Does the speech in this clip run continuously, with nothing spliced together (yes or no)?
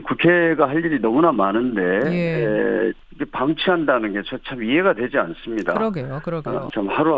no